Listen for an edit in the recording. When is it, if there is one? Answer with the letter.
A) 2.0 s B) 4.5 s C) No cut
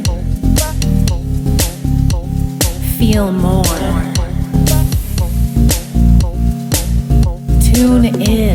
C